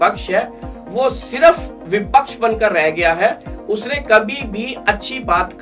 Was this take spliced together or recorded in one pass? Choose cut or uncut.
uncut